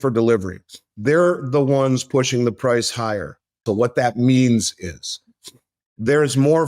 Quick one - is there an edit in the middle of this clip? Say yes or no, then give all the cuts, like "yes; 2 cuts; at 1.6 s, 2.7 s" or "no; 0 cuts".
yes; 1 cut; at 3.6 s